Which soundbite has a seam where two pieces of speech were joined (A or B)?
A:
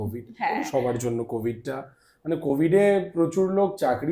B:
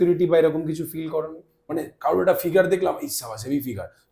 B